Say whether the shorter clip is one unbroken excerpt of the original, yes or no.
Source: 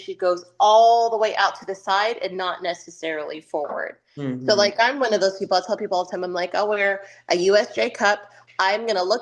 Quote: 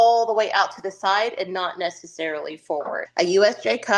no